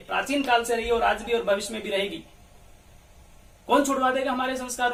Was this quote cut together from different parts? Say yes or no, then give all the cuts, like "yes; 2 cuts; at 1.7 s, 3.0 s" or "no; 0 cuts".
no; 0 cuts